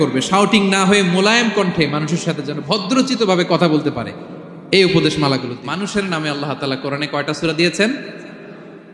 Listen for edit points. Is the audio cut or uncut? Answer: cut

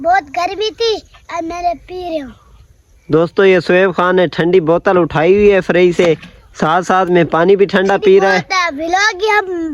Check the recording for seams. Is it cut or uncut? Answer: uncut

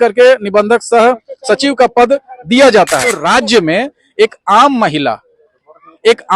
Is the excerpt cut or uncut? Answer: cut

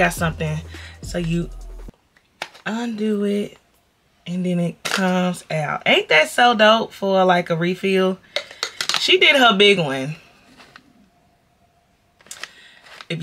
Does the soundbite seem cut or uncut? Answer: uncut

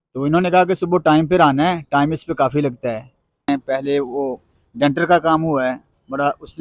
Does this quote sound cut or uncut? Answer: cut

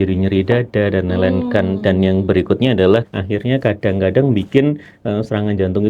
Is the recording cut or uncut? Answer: cut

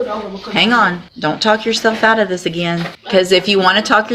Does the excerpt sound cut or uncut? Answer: cut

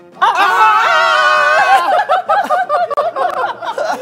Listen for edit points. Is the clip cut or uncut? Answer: uncut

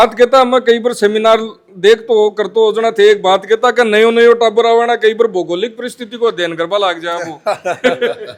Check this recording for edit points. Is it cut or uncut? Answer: uncut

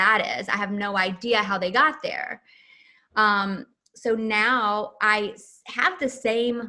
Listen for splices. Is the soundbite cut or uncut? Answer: uncut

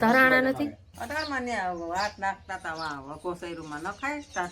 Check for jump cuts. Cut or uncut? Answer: cut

